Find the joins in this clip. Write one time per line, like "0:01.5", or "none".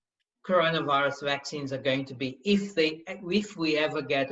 none